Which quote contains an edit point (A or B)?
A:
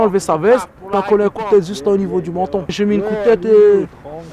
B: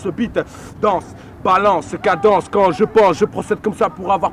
A